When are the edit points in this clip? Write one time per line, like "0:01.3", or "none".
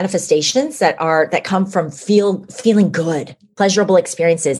0:03.4